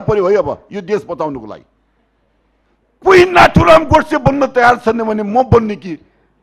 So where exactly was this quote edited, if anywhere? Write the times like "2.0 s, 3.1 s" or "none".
none

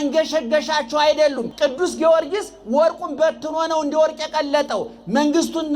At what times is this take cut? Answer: 1.5 s

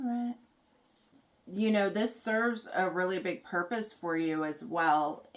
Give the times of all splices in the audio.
1.1 s

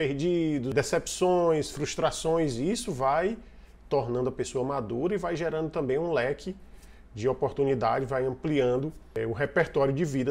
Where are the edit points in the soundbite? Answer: 0.7 s, 9.2 s

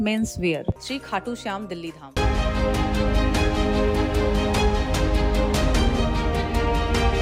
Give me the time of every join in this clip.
none

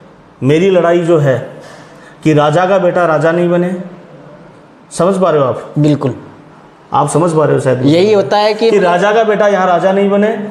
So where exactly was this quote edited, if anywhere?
none

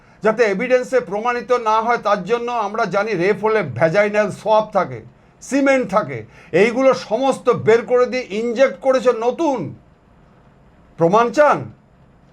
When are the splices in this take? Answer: none

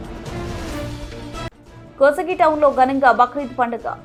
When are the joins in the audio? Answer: none

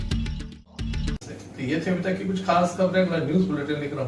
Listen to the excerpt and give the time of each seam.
none

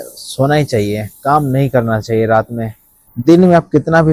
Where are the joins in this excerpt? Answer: 3.0 s

